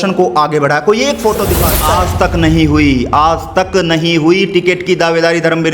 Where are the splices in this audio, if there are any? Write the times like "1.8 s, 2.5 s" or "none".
1.7 s